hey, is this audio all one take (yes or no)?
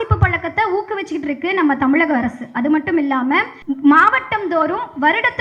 no